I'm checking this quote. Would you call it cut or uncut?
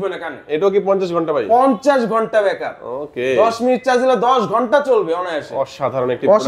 uncut